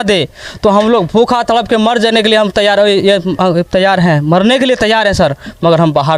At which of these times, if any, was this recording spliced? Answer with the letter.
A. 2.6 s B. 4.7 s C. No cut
C